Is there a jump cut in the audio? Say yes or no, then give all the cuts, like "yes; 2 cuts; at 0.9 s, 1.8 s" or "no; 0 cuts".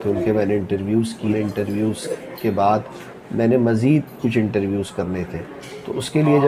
no; 0 cuts